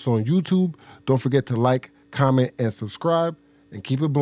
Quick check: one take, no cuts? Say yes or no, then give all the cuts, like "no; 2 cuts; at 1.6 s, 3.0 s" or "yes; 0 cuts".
yes; 0 cuts